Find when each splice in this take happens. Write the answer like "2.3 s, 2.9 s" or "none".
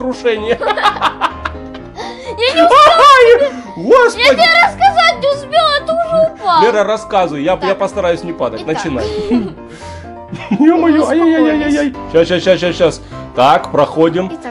none

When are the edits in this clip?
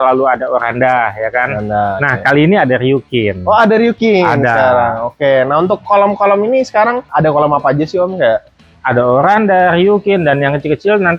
none

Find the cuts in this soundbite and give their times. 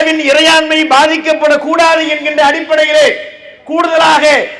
none

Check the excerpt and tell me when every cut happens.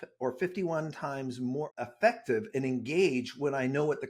1.7 s

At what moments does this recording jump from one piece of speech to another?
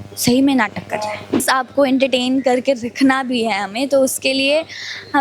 1.4 s

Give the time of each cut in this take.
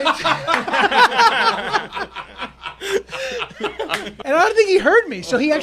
4.1 s

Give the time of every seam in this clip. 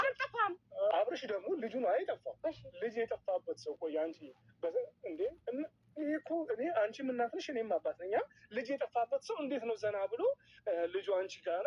0.9 s

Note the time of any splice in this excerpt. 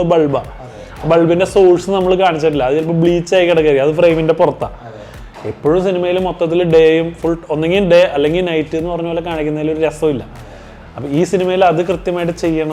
4.8 s

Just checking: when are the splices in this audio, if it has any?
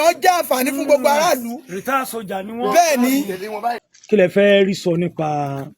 3.9 s

